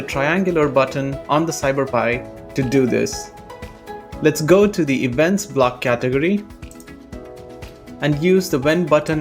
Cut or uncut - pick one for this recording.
uncut